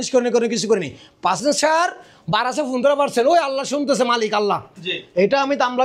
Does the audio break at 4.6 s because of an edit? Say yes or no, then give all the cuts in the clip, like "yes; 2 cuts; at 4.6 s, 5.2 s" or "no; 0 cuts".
no; 1 cut; at 1.4 s